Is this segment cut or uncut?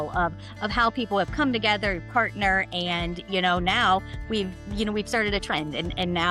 uncut